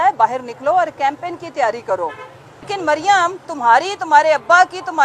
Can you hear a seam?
yes; 1 cut; at 2.7 s

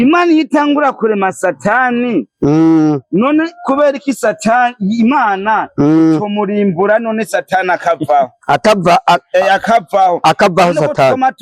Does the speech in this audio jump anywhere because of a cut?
no; 0 cuts

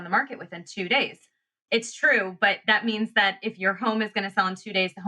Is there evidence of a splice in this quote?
yes; 1 cut; at 1.5 s

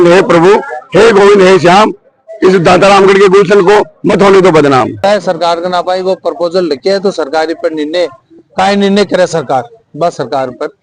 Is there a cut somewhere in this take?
yes; 1 cut; at 5.0 s

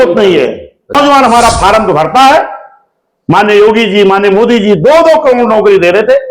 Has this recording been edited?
yes; 1 cut; at 0.9 s

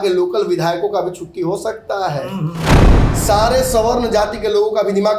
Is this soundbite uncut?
no; 1 cut; at 2.7 s

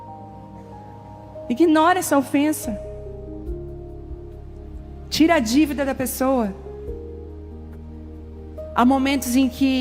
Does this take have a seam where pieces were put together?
yes; 3 cuts; at 0.9 s, 6.9 s, 8.7 s

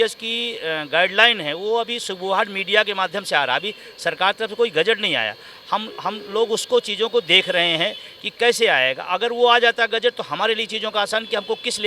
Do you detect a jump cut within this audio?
no; 0 cuts

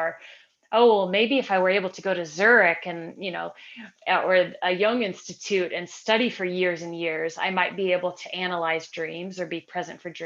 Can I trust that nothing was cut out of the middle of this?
yes; 0 cuts

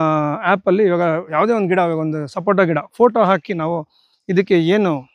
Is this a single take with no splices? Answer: no; 1 cut; at 1.3 s

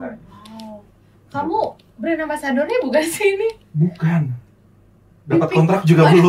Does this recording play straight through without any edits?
yes; 0 cuts

